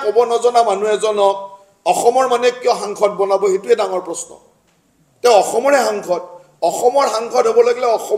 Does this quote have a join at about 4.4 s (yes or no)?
no